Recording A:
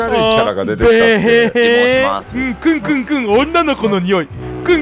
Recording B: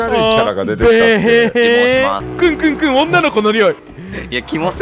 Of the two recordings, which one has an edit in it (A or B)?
B